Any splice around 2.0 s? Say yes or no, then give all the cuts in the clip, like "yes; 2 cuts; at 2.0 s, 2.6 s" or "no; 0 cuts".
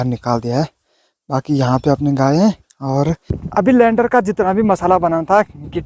no; 1 cut; at 3.3 s